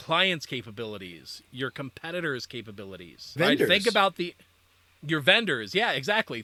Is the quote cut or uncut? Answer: uncut